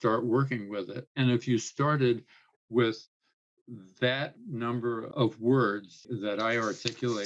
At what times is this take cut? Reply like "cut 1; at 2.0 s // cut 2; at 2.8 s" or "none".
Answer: cut 1; at 5.1 s // cut 2; at 6.0 s